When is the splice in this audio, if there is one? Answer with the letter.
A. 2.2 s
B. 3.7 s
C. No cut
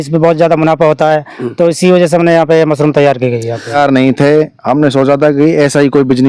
B